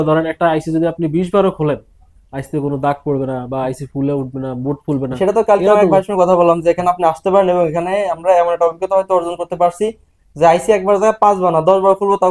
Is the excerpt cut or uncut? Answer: uncut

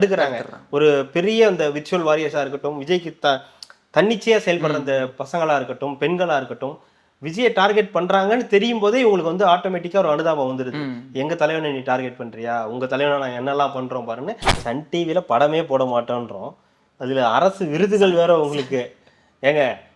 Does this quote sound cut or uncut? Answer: cut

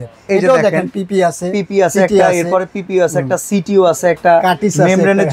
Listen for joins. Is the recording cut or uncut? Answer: uncut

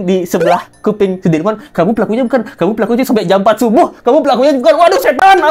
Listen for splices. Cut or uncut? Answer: uncut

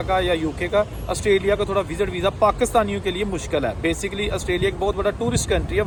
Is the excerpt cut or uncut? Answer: uncut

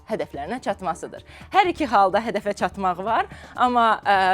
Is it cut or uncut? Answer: uncut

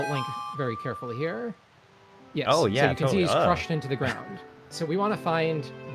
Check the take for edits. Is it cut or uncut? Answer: cut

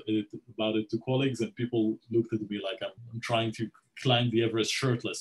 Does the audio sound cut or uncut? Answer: cut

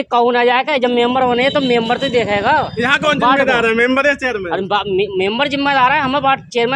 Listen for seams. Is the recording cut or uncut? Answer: uncut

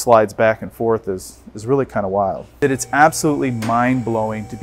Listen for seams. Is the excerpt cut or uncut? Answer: uncut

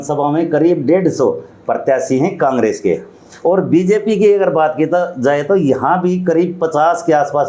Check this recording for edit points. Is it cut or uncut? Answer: uncut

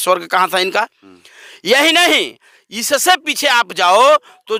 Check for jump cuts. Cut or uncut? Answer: uncut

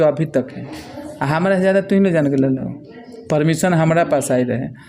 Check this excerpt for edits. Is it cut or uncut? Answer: uncut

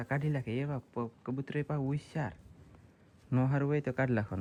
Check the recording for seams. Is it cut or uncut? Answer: uncut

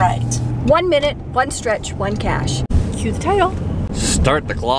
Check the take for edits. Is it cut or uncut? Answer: cut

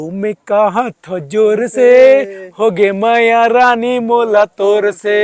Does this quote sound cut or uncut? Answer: uncut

